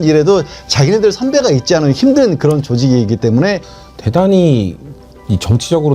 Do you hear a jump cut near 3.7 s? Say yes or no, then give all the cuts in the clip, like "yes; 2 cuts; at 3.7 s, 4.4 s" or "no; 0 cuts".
yes; 1 cut; at 3.7 s